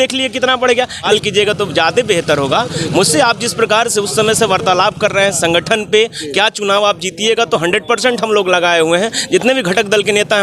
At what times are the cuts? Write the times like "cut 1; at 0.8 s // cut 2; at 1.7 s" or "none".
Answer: cut 1; at 1.1 s